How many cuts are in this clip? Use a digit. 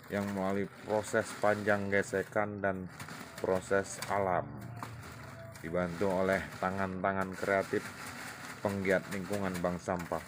0